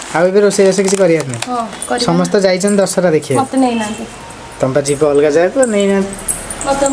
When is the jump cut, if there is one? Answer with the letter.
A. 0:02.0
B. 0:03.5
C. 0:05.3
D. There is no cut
D